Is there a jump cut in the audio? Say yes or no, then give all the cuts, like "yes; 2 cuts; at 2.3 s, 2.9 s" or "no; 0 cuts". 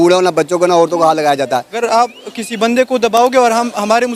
yes; 1 cut; at 1.8 s